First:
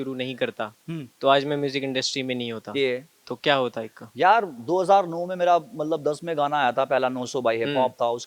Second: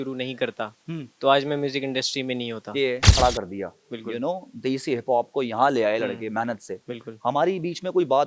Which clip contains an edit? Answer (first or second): second